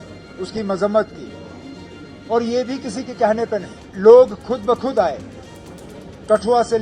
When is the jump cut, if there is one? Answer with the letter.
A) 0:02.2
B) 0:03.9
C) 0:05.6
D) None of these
B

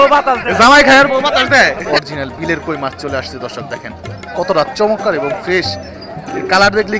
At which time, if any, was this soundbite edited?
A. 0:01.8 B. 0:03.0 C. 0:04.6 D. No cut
A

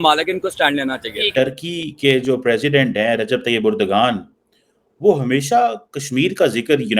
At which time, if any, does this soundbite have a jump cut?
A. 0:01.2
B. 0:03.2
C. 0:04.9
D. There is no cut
A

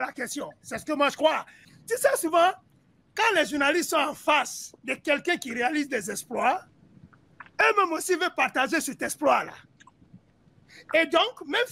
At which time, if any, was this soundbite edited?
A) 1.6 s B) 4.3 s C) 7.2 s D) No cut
A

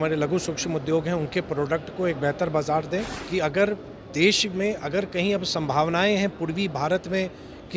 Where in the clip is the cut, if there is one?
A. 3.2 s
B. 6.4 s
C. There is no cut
A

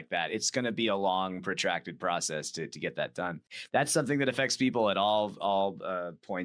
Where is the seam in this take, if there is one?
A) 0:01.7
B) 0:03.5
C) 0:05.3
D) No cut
B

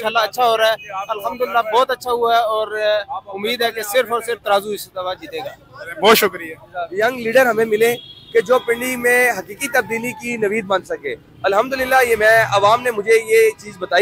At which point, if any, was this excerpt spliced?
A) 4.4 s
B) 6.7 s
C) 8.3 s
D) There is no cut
B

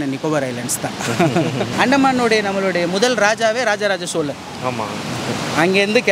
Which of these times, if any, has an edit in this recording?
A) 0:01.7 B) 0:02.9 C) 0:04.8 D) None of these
A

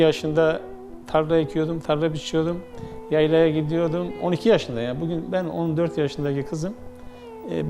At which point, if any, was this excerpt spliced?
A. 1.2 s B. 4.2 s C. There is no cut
B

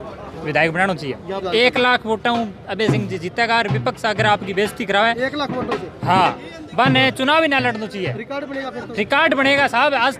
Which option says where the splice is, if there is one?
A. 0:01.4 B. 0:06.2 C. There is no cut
A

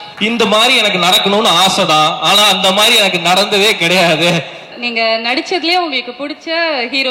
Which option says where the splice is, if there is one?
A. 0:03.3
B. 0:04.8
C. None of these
B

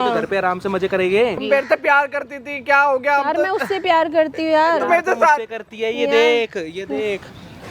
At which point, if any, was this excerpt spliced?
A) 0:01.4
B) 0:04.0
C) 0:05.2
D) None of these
A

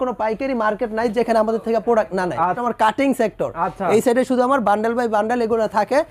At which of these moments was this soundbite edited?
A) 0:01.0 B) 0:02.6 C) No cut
B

